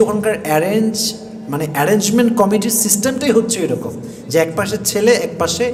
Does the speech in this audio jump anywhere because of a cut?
no; 0 cuts

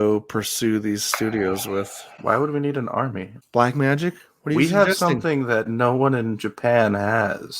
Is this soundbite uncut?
no; 1 cut; at 3.3 s

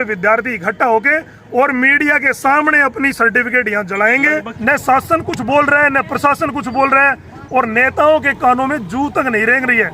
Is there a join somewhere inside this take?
yes; 1 cut; at 4.5 s

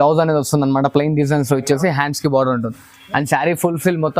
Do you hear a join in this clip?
no; 0 cuts

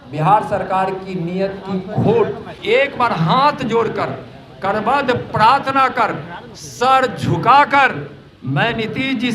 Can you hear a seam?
yes; 1 cut; at 2.5 s

